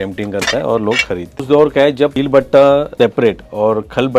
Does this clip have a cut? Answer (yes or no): yes